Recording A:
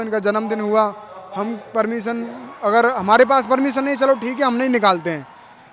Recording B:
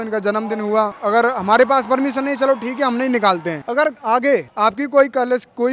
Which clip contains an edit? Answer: B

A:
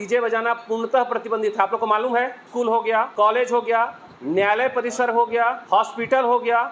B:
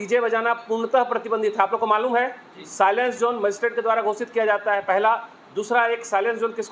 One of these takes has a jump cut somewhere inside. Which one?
A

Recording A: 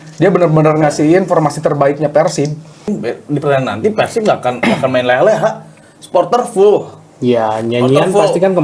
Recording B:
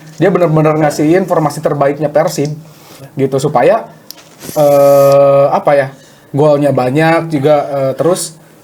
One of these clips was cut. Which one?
A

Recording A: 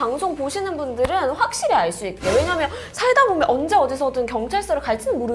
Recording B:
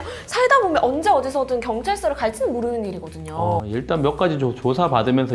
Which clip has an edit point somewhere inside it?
B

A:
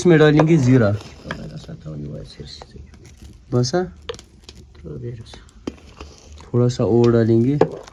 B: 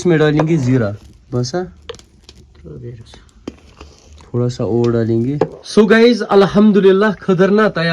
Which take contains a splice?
B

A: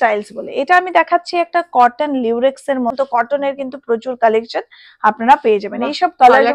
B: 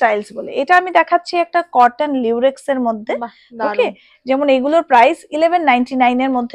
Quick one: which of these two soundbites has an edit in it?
A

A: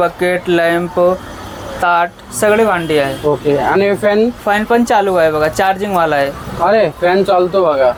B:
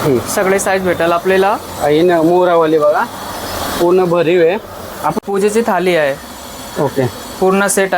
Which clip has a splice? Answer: B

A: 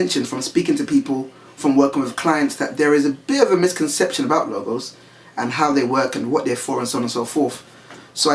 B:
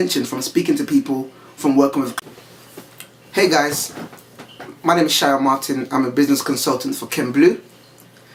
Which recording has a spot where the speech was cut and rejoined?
A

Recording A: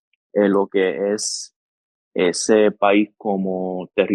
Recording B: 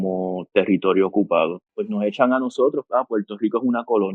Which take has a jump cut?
B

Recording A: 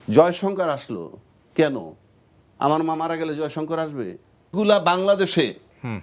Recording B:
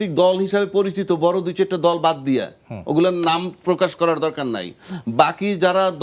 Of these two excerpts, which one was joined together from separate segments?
A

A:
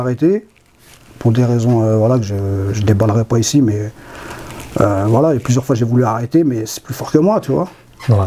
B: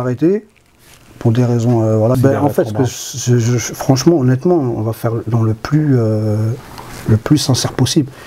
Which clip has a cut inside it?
B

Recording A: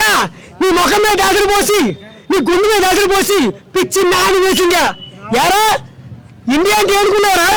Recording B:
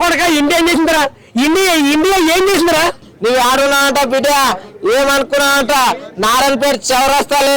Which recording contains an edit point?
B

